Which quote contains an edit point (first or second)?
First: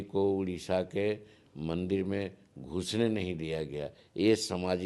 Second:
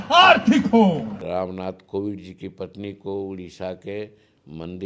second